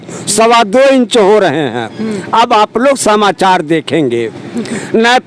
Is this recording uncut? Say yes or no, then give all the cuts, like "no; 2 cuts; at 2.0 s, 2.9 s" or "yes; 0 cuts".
yes; 0 cuts